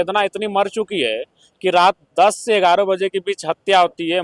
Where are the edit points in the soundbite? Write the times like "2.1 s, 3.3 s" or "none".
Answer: none